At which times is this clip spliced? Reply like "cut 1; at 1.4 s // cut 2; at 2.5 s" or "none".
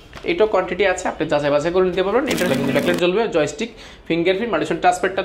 cut 1; at 2.5 s